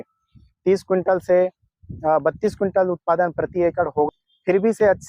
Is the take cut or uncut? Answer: cut